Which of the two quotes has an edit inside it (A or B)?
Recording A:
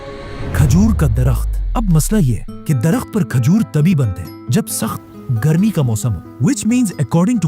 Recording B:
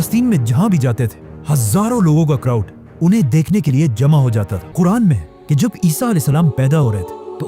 B